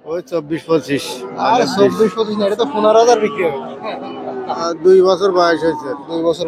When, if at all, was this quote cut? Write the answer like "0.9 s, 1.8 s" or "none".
4.7 s